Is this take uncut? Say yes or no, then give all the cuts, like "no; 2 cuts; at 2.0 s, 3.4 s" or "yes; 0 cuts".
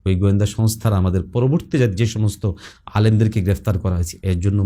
yes; 0 cuts